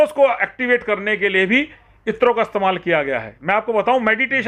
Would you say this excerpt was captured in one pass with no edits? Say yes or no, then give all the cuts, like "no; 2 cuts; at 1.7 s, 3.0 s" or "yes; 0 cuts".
yes; 0 cuts